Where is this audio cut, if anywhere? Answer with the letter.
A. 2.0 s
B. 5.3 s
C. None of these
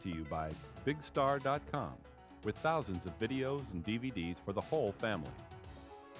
B